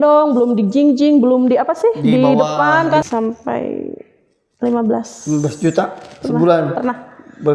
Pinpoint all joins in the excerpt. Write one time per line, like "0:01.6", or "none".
0:03.0